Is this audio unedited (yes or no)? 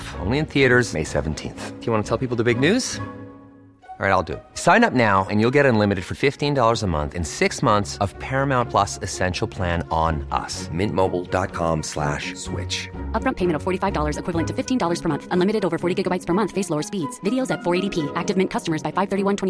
yes